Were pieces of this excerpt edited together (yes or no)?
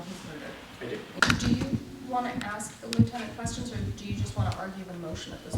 yes